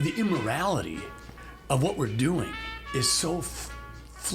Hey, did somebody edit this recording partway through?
yes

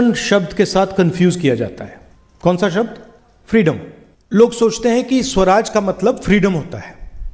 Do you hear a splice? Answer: no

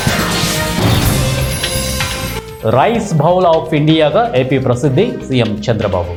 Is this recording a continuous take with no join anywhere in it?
yes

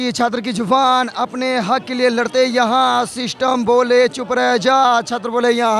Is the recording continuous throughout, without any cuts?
yes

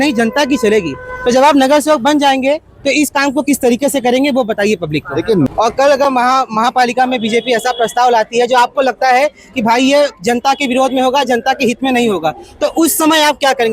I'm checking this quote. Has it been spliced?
yes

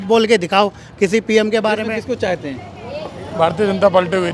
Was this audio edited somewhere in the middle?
yes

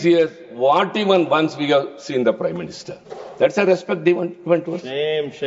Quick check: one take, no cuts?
yes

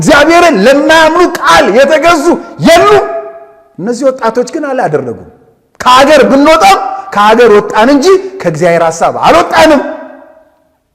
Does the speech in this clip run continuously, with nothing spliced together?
yes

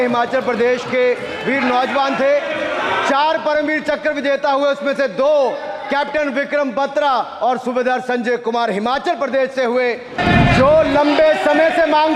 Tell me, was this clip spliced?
yes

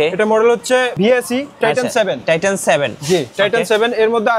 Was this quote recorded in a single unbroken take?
no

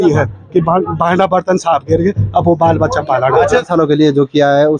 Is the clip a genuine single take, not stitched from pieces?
no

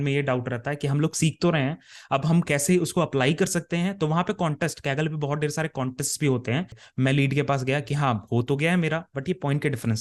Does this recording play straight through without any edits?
no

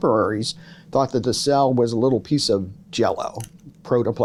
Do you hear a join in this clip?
no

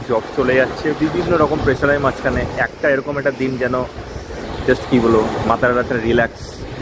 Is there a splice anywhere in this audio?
no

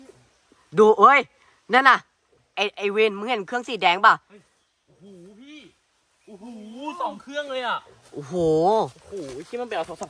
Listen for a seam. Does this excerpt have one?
no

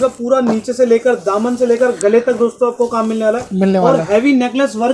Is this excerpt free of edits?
yes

